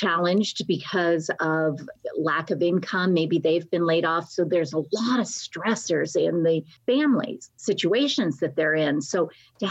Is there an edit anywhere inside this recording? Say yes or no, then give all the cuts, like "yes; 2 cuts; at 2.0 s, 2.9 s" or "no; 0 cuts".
yes; 3 cuts; at 1.9 s, 6.7 s, 7.5 s